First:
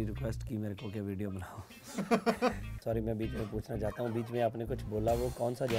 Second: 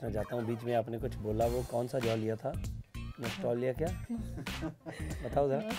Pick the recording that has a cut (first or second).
first